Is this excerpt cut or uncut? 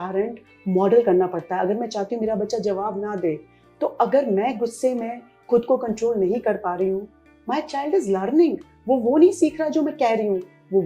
uncut